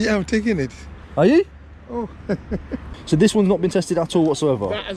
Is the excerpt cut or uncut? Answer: cut